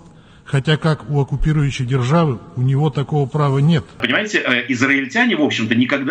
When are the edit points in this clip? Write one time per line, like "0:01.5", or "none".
0:04.0

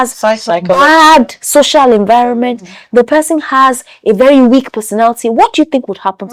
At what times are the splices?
none

